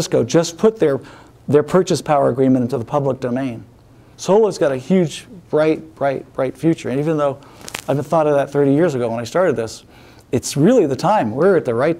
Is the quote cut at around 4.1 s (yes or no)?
yes